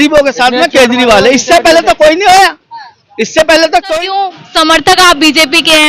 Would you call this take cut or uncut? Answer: cut